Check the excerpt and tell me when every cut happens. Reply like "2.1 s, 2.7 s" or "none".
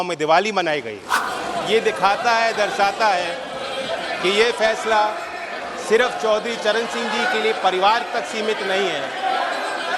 1.3 s